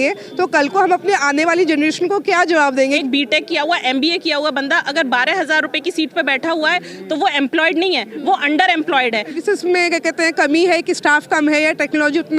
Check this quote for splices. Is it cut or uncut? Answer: cut